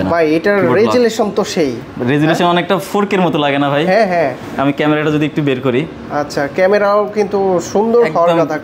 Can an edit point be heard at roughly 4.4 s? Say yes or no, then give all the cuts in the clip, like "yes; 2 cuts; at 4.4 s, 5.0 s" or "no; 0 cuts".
no; 0 cuts